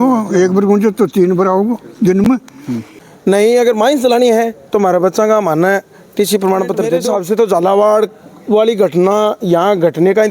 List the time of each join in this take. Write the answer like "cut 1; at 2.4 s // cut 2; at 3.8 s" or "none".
cut 1; at 2.5 s // cut 2; at 7.0 s